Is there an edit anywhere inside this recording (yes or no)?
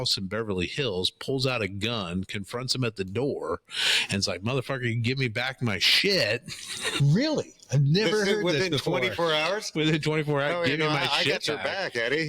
no